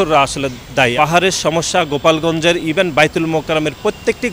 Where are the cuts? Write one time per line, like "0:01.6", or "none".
0:00.9